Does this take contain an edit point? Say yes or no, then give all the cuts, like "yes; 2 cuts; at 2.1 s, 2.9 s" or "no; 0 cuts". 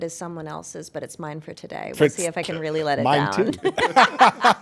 no; 0 cuts